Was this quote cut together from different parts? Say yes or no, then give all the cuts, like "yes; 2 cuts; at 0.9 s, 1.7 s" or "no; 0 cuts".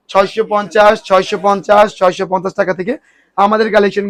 no; 0 cuts